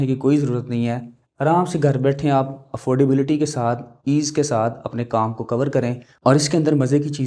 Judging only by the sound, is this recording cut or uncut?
cut